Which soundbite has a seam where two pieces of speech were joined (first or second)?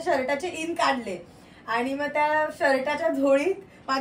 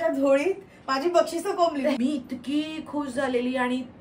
second